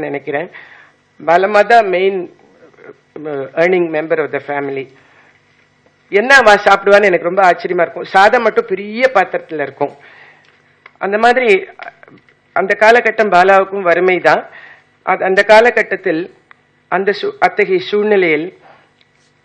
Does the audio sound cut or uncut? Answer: cut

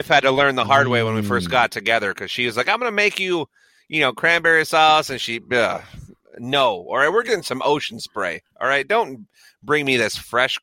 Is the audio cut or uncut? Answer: uncut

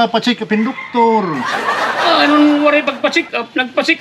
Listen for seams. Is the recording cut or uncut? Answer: uncut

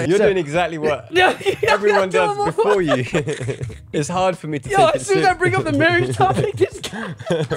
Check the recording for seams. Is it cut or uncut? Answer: cut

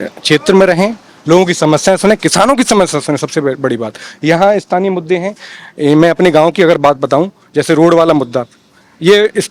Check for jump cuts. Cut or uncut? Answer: uncut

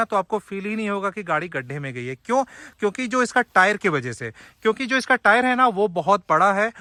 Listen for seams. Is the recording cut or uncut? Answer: uncut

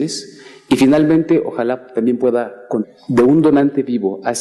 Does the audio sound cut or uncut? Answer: uncut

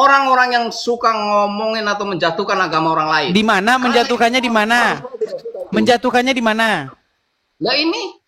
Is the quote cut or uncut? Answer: uncut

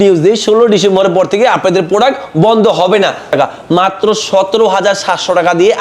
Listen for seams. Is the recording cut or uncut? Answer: cut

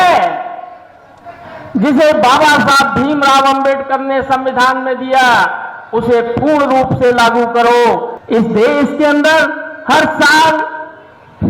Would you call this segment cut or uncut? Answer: cut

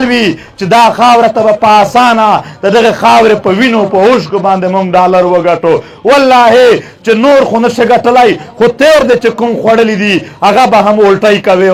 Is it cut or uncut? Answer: uncut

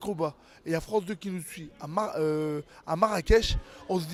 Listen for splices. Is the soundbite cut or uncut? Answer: uncut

